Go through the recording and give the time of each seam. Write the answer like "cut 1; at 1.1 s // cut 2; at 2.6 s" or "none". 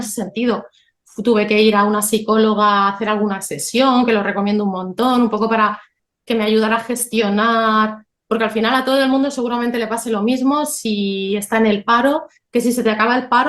none